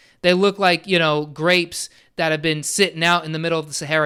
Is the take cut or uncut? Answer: uncut